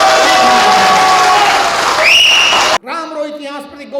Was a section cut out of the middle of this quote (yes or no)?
yes